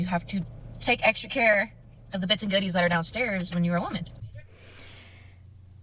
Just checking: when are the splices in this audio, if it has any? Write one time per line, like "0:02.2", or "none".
none